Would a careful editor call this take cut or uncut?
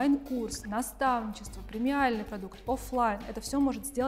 uncut